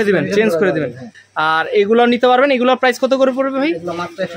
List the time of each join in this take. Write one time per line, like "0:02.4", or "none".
0:01.1

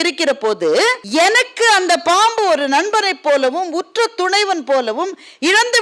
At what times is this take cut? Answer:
0:01.0

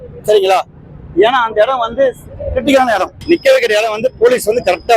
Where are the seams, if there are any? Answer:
0:03.1

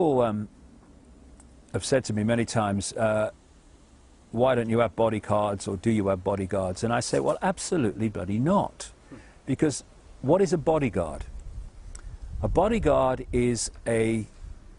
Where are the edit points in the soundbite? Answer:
0:05.0

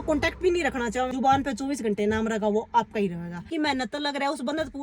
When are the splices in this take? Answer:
0:01.1
0:03.4

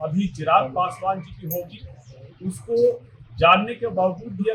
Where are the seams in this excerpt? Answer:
none

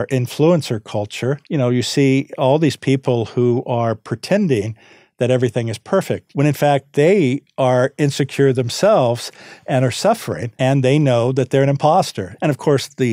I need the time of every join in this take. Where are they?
0:01.4
0:06.2
0:10.4
0:12.2

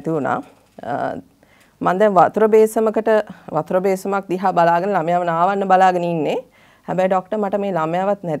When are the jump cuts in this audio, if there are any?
none

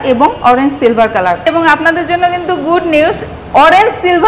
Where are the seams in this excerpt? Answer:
0:01.4

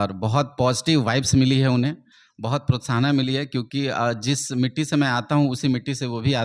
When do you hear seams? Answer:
none

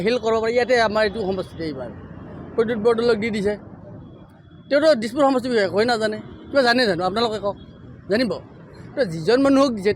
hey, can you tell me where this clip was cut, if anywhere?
none

